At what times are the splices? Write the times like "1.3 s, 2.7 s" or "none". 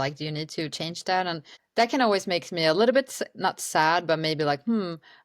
1.5 s